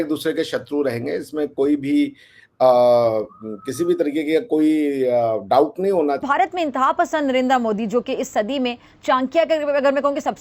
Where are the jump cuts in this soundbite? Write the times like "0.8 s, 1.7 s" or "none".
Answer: 6.2 s

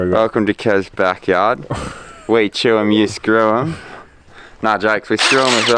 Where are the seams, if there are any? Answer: none

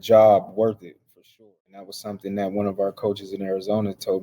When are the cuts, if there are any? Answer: 1.5 s

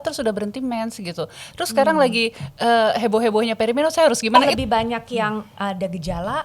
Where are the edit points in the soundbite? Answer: 4.4 s

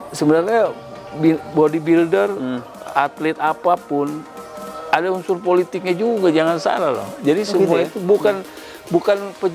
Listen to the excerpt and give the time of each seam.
none

